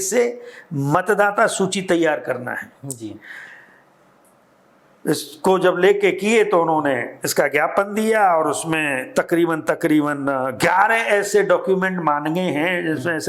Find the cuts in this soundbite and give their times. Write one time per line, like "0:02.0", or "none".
none